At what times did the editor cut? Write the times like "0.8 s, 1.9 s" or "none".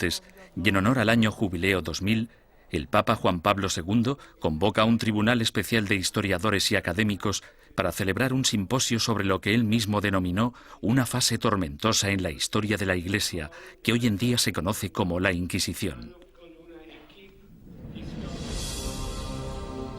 2.5 s